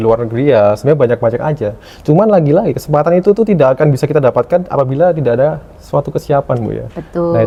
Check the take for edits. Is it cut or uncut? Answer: uncut